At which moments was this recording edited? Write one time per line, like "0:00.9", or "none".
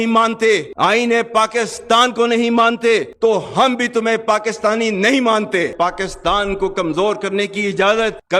0:03.1
0:05.7